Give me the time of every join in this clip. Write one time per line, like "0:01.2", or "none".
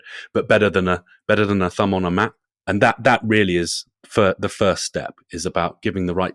none